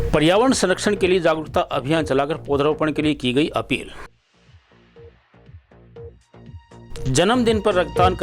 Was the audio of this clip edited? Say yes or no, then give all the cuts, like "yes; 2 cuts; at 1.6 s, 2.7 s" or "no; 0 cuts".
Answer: yes; 1 cut; at 7.1 s